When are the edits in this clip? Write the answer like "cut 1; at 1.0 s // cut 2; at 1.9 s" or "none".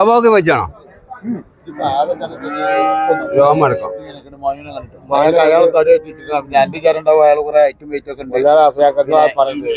none